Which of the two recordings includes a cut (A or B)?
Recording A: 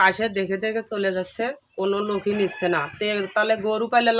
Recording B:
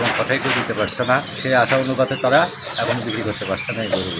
B